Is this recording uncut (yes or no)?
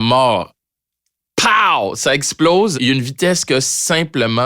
no